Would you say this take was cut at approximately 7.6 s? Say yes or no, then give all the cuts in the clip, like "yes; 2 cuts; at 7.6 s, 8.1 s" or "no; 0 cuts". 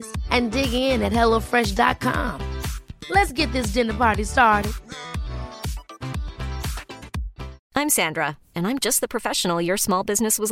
yes; 1 cut; at 7.6 s